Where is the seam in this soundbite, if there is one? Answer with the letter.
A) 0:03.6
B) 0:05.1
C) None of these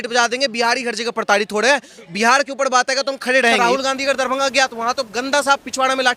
A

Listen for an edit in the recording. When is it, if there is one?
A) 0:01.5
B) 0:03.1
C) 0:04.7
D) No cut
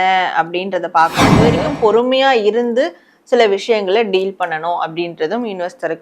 A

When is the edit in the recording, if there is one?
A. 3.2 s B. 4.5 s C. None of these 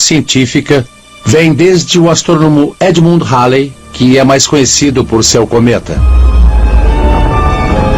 B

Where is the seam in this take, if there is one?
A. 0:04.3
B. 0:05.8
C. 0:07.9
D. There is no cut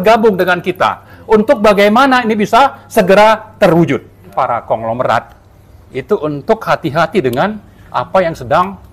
A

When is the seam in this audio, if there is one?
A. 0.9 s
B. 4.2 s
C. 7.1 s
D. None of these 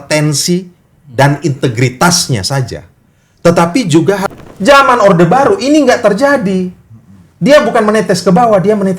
B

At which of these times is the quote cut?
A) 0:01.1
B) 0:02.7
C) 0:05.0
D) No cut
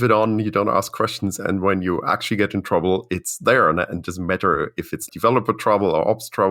C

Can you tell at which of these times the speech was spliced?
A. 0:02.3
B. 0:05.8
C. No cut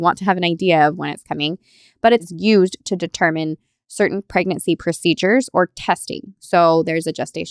A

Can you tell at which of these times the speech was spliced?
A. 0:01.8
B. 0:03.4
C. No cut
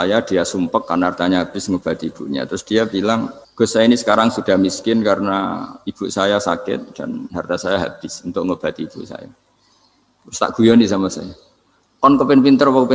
B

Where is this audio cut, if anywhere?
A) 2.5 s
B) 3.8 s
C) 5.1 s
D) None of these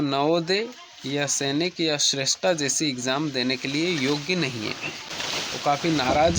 C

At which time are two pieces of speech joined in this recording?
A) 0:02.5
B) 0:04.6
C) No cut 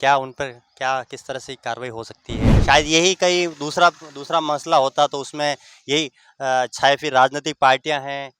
A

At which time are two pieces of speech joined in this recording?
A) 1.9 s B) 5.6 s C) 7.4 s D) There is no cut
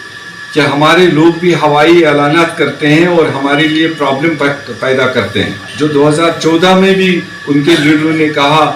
B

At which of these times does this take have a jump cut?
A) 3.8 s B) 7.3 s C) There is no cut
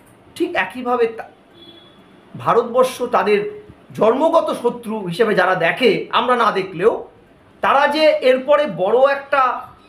C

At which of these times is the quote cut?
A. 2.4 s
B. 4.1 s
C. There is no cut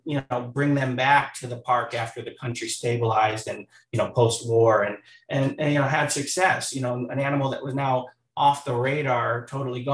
C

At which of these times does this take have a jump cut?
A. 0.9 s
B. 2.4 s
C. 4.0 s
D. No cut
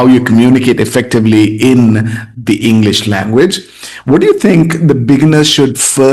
D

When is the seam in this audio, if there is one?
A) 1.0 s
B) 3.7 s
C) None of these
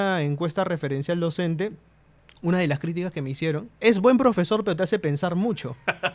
B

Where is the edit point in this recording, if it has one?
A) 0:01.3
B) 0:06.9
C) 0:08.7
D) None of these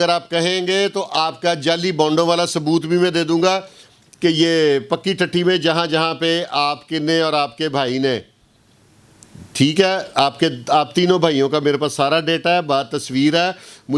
D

